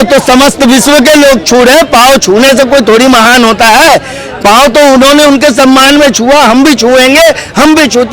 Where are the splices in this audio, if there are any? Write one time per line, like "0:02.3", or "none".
none